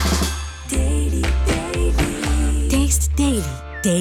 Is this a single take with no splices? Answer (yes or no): yes